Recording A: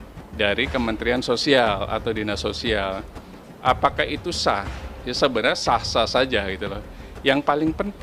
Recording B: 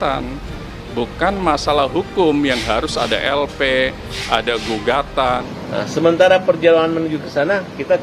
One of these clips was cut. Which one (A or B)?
B